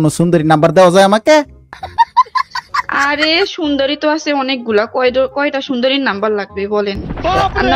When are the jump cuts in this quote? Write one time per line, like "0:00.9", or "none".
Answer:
none

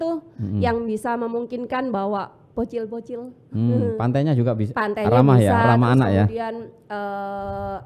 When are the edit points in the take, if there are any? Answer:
none

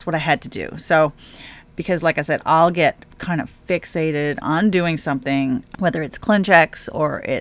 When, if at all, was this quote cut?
0:05.7

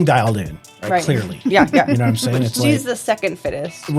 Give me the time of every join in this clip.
none

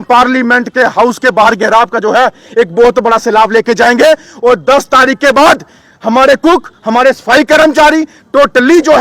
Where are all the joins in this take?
none

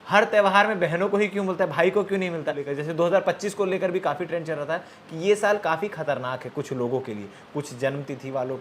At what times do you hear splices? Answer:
0:02.7

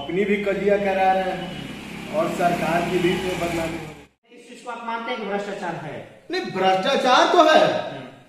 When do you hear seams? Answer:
0:04.6

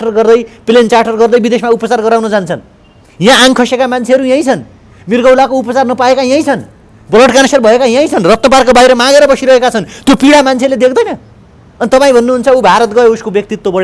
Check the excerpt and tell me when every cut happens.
none

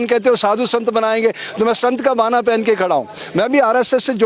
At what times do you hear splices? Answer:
none

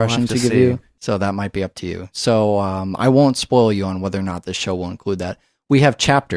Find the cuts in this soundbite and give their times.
0:04.1

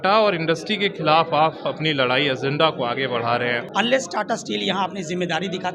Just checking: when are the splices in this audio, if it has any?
0:03.6

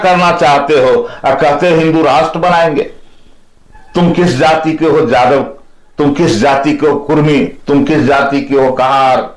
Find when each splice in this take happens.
none

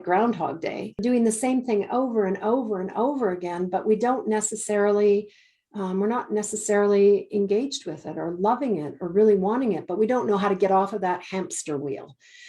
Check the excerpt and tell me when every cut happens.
0:01.0

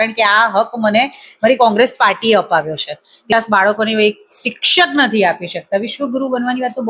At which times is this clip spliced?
0:03.3

